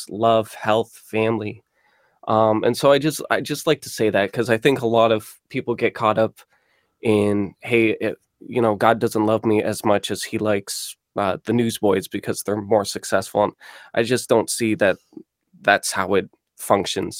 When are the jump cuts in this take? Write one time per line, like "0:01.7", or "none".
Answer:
none